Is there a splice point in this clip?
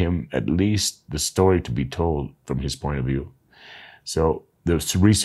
no; 0 cuts

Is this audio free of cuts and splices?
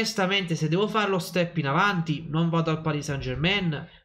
yes; 0 cuts

